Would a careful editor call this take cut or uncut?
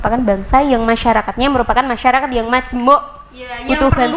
uncut